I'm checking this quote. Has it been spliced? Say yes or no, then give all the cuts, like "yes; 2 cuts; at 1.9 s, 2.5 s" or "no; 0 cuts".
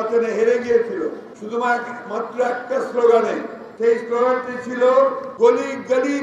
yes; 3 cuts; at 1.3 s, 3.6 s, 5.2 s